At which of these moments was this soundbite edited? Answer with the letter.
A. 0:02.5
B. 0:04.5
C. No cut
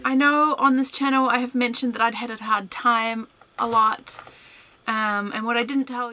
C